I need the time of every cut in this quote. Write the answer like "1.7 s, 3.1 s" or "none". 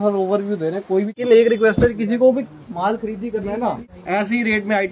1.2 s, 3.9 s